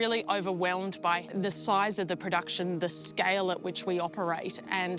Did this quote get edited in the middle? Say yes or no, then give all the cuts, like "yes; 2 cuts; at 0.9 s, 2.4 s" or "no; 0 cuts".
no; 0 cuts